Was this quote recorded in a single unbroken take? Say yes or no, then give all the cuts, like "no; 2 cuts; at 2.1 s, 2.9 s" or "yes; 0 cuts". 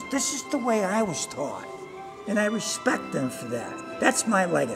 yes; 0 cuts